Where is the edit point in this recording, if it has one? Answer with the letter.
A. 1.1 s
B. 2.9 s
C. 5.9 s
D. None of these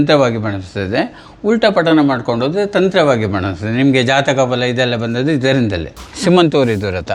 C